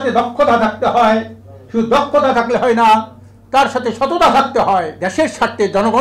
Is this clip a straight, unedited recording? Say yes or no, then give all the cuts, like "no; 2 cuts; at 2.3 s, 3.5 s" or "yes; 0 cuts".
no; 1 cut; at 5.0 s